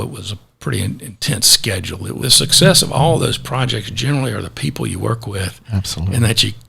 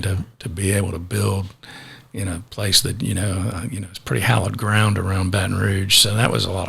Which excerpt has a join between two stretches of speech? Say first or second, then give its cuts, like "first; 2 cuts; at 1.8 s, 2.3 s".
first; 1 cut; at 2.2 s